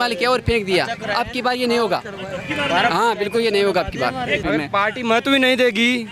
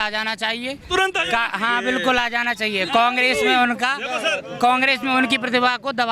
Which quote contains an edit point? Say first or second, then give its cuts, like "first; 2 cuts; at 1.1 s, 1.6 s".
first; 1 cut; at 4.4 s